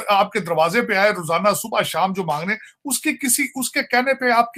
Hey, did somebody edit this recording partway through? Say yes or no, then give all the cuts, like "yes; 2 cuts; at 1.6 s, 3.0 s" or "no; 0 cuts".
no; 0 cuts